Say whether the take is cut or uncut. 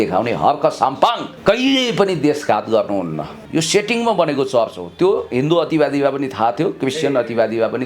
cut